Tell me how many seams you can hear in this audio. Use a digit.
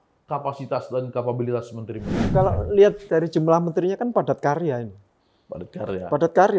1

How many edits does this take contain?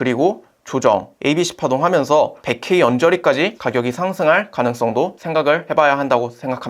3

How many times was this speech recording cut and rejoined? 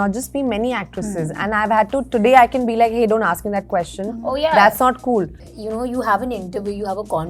1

